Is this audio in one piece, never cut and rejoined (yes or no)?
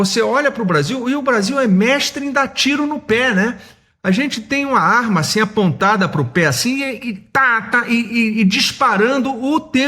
yes